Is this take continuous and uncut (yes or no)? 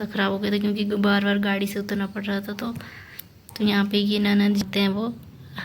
no